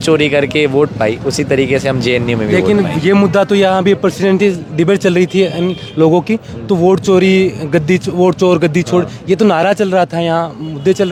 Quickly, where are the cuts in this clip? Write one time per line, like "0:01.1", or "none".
none